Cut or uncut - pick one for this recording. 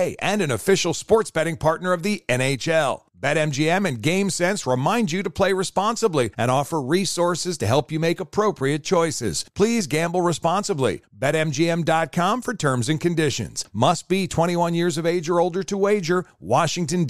uncut